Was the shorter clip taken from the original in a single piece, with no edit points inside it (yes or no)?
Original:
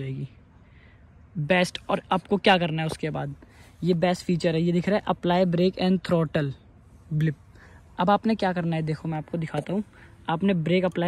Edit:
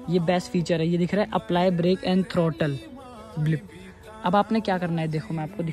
yes